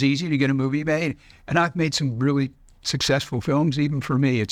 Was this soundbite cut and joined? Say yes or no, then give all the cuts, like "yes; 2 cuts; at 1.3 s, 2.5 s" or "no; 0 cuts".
no; 0 cuts